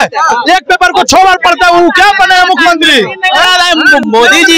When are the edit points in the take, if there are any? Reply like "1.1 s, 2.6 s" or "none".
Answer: none